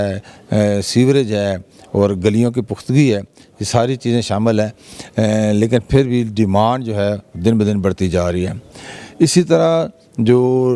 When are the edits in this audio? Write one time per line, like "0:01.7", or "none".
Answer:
none